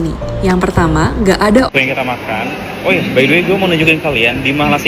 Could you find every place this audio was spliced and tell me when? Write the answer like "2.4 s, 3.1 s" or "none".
1.7 s